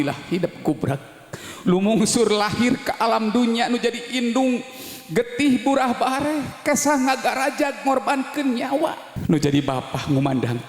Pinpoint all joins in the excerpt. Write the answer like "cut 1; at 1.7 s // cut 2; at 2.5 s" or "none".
cut 1; at 9.1 s